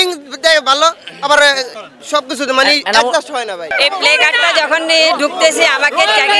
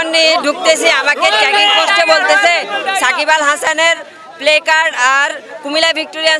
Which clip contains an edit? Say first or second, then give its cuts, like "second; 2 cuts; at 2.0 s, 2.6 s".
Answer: first; 1 cut; at 3.6 s